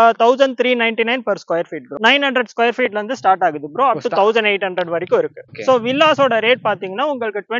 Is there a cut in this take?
yes; 2 cuts; at 1.8 s, 5.4 s

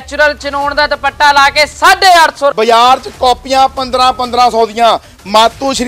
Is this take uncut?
no; 1 cut; at 2.5 s

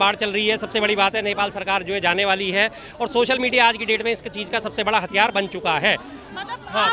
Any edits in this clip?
no; 0 cuts

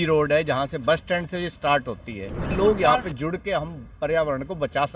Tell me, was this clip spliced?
yes; 1 cut; at 2.5 s

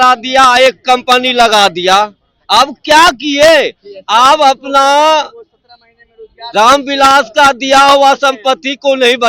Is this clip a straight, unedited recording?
yes; 0 cuts

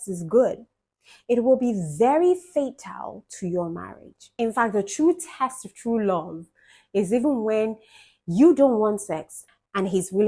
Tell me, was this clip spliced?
yes; 1 cut; at 4.3 s

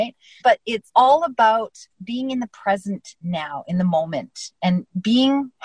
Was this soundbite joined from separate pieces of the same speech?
no; 0 cuts

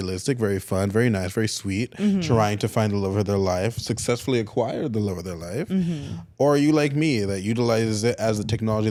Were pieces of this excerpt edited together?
no; 0 cuts

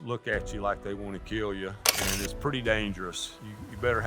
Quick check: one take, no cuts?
no; 1 cut; at 1.9 s

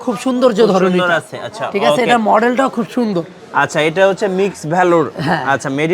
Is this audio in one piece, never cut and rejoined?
yes; 0 cuts

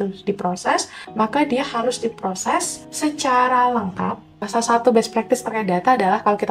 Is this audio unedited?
no; 3 cuts; at 1.0 s, 2.8 s, 4.4 s

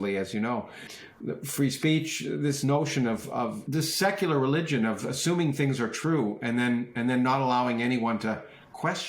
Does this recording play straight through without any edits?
no; 2 cuts; at 1.0 s, 3.6 s

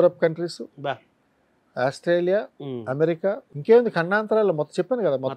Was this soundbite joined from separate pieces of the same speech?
yes; 1 cut; at 3.5 s

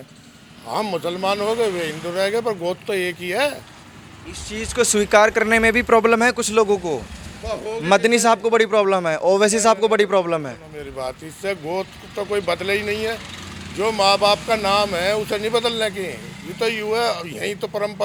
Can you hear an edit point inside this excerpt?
no; 0 cuts

